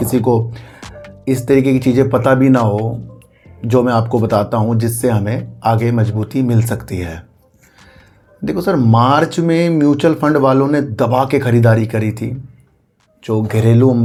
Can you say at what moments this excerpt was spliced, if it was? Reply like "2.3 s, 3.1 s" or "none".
none